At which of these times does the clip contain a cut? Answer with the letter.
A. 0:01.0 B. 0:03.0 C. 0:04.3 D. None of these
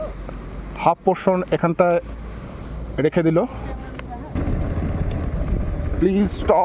C